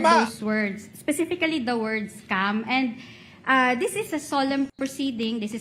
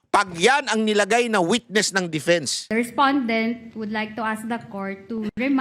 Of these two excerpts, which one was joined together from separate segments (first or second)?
second